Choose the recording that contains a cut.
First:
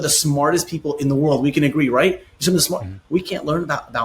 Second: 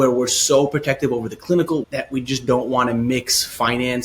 second; 1 cut; at 1.9 s

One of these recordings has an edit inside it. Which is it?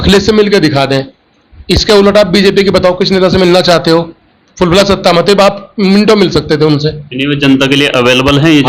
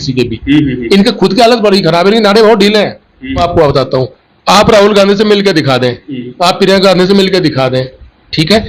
second; 1 cut; at 3.4 s

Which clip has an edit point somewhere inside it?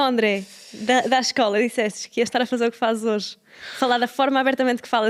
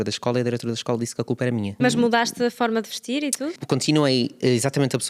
second; 2 cuts; at 1.8 s, 3.6 s

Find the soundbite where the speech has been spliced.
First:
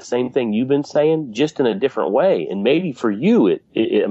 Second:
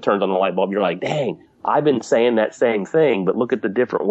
second; 2 cuts; at 1.5 s, 3.3 s

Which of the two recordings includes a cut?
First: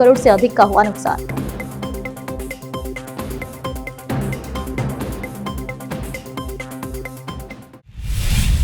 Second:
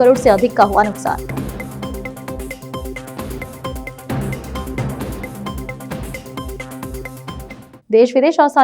first; 1 cut; at 7.7 s

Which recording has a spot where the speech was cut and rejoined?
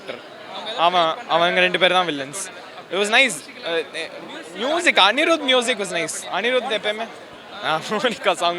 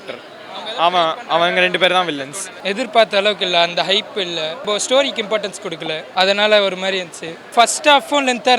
second; 4 cuts; at 2.5 s, 4.6 s, 6.0 s, 7.5 s

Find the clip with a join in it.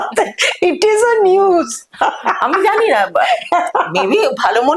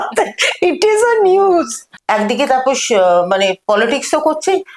second; 1 cut; at 1.8 s

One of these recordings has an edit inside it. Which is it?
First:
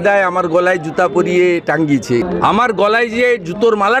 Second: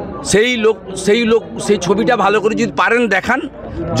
first; 1 cut; at 2.2 s

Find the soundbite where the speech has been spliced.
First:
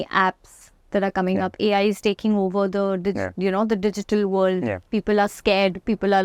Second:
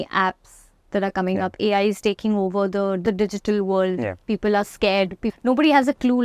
second; 2 cuts; at 3.0 s, 5.2 s

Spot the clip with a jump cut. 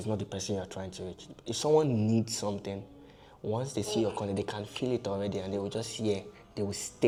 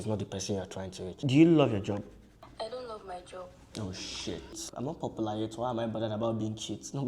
second; 2 cuts; at 1.1 s, 4.7 s

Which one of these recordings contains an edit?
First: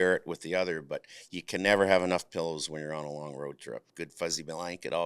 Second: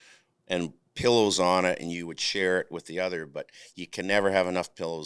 first; 1 cut; at 3.9 s

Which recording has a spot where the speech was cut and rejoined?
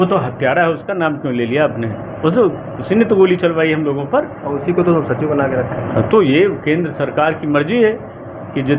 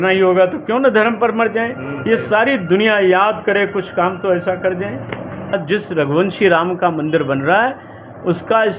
second; 1 cut; at 5.5 s

